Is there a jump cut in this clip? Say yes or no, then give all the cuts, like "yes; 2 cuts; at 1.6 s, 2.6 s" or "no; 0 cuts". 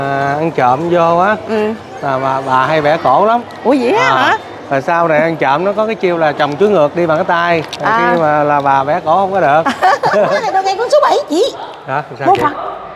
yes; 1 cut; at 10.5 s